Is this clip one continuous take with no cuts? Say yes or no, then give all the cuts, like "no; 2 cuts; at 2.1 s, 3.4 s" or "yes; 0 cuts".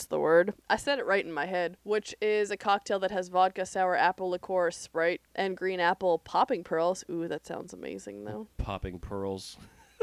no; 2 cuts; at 1.8 s, 5.3 s